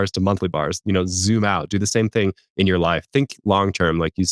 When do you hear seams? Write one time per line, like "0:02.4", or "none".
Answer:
none